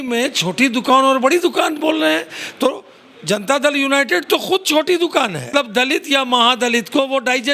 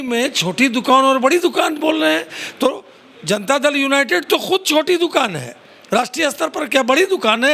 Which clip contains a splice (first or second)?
first